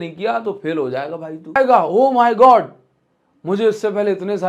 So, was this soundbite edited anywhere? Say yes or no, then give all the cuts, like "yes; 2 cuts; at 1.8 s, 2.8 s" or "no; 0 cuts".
yes; 1 cut; at 1.6 s